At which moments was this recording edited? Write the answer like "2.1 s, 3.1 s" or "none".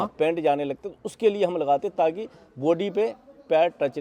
none